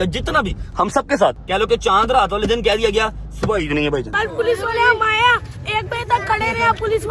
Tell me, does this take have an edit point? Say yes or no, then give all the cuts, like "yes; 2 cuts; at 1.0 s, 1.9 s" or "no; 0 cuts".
yes; 2 cuts; at 1.4 s, 4.1 s